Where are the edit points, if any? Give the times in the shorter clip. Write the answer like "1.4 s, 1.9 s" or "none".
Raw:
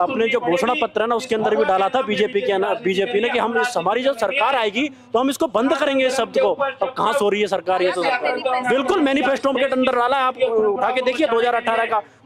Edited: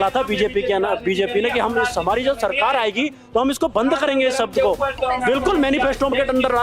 4.9 s